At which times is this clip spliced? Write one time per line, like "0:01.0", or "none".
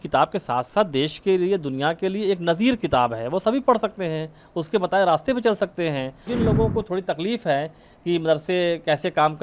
0:06.3